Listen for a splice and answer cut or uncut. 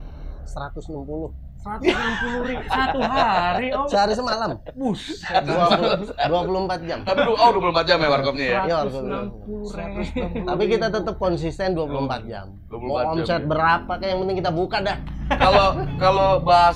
uncut